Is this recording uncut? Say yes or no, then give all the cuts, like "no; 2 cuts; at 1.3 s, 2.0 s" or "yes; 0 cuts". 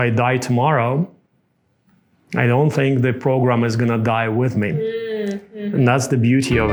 yes; 0 cuts